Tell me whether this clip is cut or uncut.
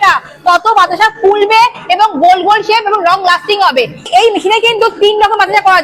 cut